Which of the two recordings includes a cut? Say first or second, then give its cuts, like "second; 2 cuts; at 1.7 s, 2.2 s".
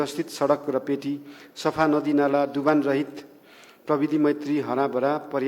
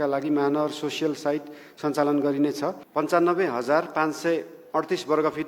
second; 1 cut; at 2.8 s